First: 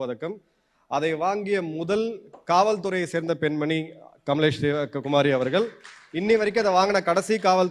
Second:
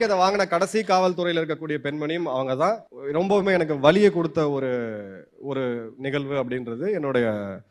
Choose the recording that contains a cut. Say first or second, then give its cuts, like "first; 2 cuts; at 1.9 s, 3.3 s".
second; 1 cut; at 2.9 s